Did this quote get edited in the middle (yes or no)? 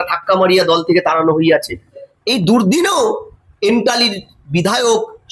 yes